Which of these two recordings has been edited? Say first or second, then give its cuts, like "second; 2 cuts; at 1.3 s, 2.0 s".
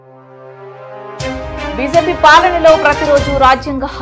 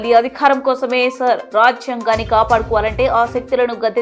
first; 1 cut; at 1.7 s